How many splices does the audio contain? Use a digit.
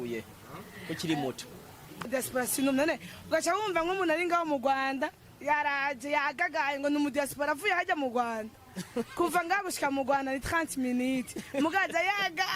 1